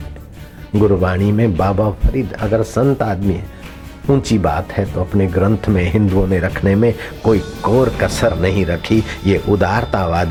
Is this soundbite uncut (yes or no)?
yes